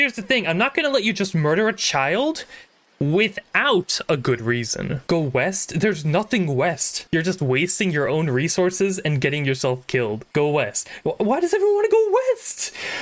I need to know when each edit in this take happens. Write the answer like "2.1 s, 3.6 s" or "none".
5.0 s, 7.0 s, 10.2 s